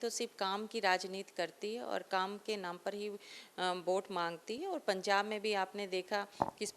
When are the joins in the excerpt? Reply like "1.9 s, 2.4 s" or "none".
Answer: none